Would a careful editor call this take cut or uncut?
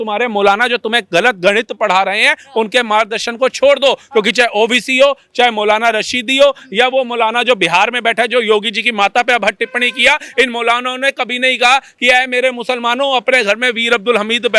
uncut